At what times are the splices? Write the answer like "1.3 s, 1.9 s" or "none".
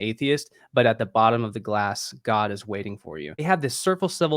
3.4 s